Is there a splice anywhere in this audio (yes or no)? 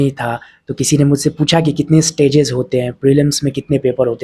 no